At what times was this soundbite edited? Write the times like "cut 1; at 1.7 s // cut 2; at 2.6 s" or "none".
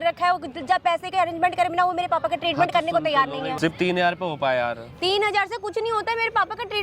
cut 1; at 3.5 s